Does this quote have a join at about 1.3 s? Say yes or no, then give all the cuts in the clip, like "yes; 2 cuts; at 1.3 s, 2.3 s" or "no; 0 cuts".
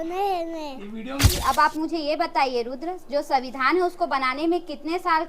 yes; 1 cut; at 1.3 s